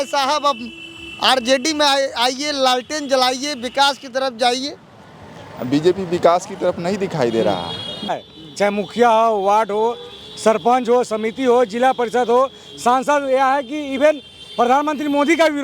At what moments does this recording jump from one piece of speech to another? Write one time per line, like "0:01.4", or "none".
0:08.1